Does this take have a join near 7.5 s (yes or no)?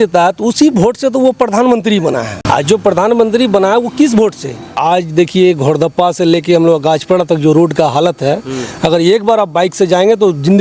no